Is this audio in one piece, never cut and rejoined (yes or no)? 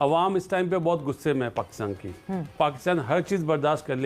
no